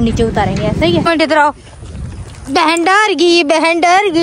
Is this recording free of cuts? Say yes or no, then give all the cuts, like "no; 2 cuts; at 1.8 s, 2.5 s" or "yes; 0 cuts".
no; 1 cut; at 1.1 s